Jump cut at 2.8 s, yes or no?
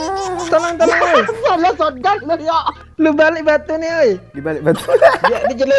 yes